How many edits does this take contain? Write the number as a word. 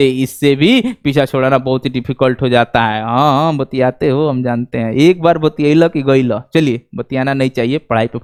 zero